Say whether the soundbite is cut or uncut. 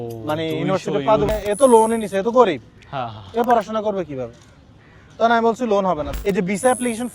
cut